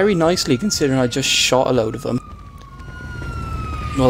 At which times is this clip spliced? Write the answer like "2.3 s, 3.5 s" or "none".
3.0 s